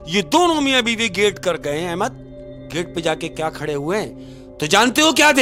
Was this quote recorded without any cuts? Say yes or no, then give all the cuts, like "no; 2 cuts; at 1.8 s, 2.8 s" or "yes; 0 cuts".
yes; 0 cuts